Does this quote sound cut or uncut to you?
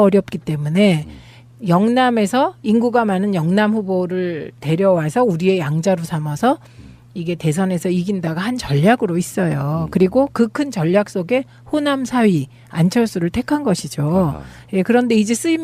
uncut